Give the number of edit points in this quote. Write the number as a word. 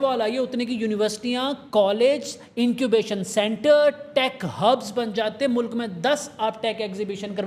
zero